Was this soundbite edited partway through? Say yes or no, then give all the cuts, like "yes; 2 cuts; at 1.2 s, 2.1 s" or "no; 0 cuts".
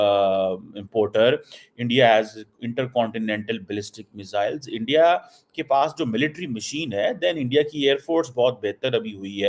no; 0 cuts